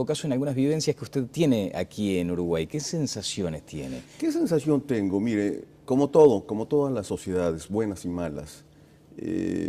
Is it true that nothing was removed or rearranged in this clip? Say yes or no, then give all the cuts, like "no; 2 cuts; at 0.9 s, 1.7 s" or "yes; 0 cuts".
no; 1 cut; at 3.0 s